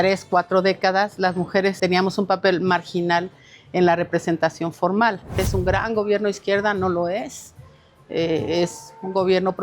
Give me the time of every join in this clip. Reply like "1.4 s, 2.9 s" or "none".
1.8 s, 5.4 s

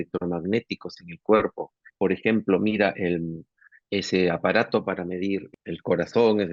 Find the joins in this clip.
1.8 s, 3.6 s, 5.5 s

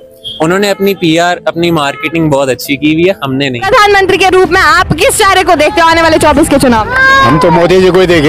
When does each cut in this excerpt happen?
3.7 s

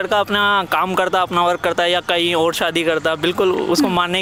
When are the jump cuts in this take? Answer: none

